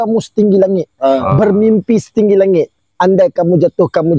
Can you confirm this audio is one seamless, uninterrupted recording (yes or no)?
yes